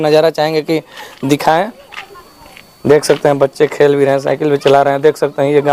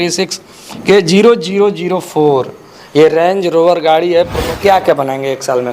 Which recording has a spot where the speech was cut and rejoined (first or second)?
second